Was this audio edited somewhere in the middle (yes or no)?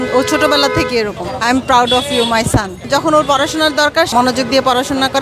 yes